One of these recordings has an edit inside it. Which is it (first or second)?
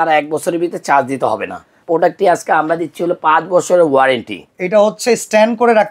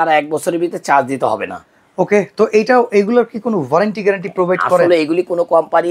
first